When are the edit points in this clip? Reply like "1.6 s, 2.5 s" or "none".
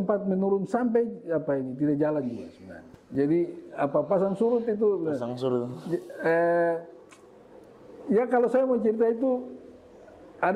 none